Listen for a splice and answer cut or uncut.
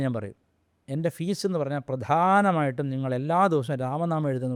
uncut